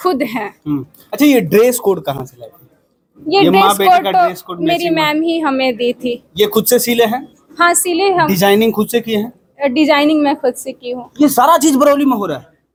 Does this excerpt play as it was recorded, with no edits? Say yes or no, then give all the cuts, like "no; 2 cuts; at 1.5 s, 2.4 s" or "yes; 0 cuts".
yes; 0 cuts